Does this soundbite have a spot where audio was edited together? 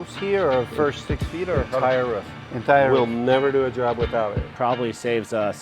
yes; 1 cut; at 4.4 s

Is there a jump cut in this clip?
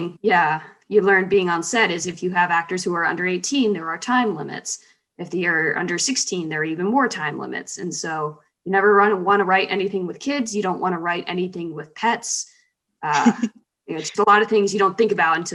no; 0 cuts

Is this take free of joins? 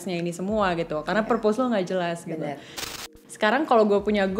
no; 1 cut; at 2.9 s

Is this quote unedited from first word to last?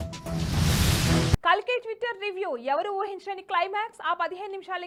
yes; 0 cuts

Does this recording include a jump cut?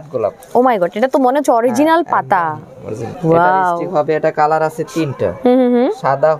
no; 0 cuts

